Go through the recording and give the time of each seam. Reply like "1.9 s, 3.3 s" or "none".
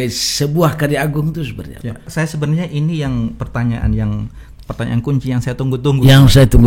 2.1 s